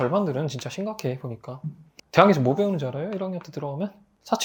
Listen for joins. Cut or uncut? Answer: uncut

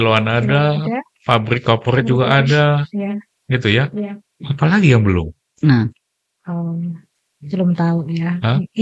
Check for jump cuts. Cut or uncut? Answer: uncut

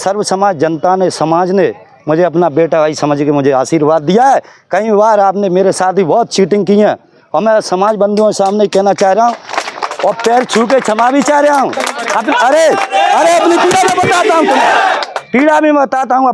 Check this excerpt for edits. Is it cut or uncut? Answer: uncut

